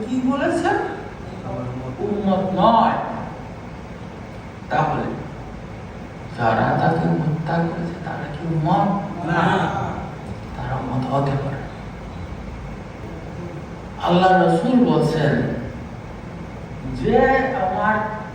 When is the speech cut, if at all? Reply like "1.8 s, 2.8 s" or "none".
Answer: 13.0 s, 16.5 s